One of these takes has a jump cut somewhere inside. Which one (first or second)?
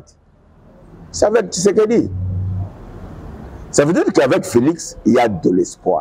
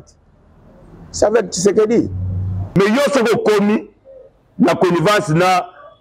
second